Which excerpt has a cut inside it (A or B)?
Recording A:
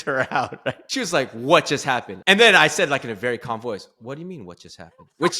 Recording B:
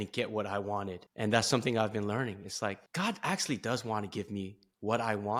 A